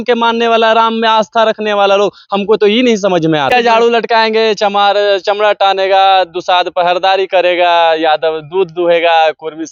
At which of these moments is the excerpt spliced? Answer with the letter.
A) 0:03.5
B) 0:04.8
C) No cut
A